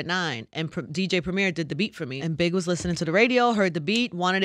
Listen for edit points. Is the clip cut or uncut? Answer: cut